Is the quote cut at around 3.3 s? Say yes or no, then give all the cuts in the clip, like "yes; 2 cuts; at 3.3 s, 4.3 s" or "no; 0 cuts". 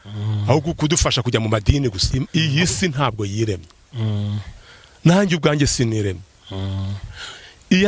no; 1 cut; at 2.1 s